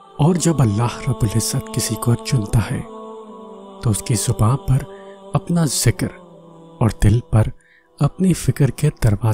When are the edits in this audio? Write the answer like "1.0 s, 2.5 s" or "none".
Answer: none